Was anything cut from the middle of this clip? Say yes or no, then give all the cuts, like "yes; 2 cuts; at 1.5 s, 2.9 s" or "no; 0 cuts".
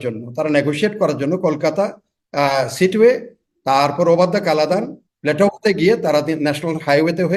no; 0 cuts